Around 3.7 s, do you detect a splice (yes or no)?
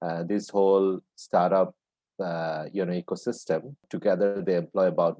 yes